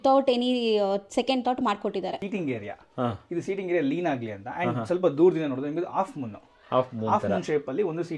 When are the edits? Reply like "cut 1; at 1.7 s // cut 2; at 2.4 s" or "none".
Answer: cut 1; at 2.2 s